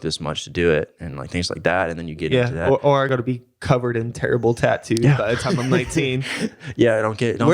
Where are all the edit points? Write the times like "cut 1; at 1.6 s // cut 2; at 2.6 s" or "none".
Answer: cut 1; at 3.1 s